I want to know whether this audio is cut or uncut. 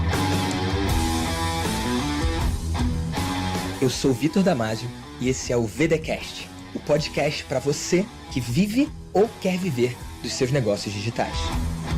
uncut